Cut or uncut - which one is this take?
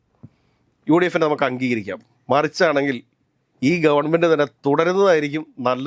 uncut